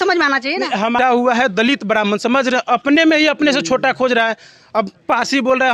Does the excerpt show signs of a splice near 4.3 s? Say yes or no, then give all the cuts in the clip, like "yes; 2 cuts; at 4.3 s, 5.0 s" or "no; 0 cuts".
no; 1 cut; at 1.0 s